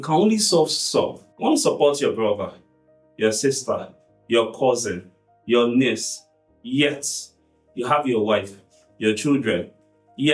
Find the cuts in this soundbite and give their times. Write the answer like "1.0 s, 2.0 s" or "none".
1.2 s